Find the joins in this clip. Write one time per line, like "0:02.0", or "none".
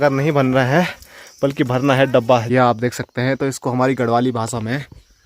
0:02.4

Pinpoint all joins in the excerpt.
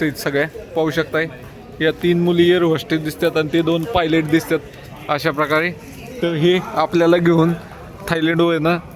none

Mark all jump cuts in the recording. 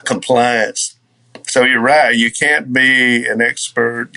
0:01.3

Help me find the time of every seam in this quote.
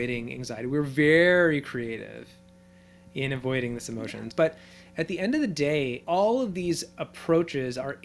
0:04.3

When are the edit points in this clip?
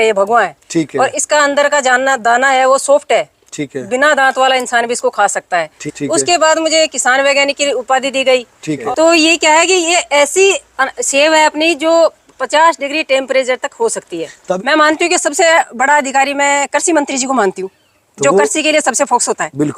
0:05.8
0:08.8
0:14.6

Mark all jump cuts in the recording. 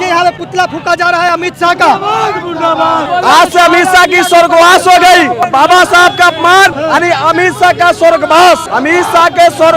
0:03.0
0:05.4
0:06.8
0:08.7

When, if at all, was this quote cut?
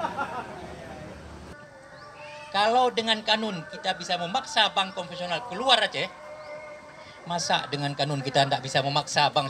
0:01.5

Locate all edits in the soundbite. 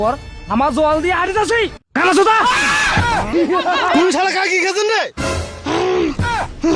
0:03.3

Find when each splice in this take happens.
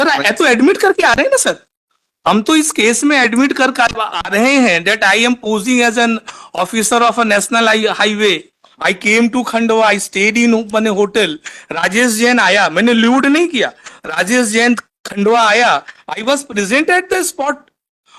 none

